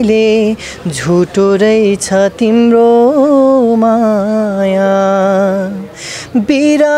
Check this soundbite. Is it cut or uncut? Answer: uncut